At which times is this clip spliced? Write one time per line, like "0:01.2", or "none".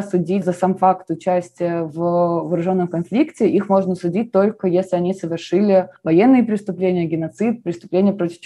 none